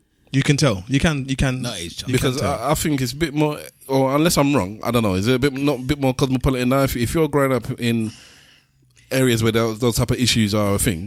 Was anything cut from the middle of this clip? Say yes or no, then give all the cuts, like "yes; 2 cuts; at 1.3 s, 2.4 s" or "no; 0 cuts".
no; 0 cuts